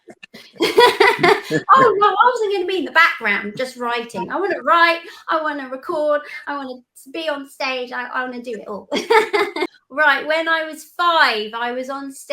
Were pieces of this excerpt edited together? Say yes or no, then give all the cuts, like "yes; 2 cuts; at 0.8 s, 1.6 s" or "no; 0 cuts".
yes; 1 cut; at 9.7 s